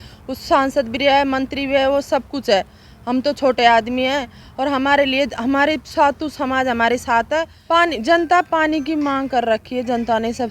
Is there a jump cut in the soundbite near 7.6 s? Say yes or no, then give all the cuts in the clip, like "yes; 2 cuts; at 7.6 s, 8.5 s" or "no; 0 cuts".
yes; 1 cut; at 7.6 s